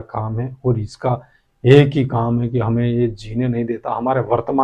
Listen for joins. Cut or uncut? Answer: uncut